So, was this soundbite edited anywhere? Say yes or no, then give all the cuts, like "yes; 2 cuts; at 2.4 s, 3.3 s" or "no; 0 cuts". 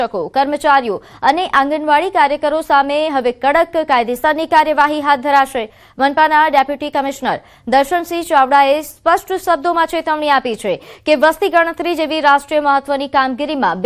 yes; 1 cut; at 6.5 s